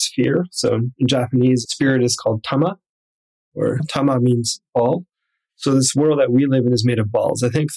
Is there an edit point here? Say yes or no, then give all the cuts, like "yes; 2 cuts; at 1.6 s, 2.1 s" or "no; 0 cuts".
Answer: no; 0 cuts